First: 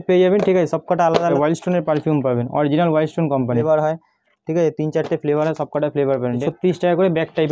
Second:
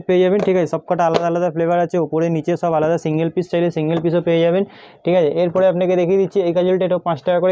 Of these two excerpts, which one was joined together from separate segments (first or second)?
first